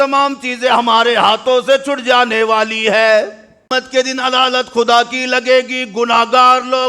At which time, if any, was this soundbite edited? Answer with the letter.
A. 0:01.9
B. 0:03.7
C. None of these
B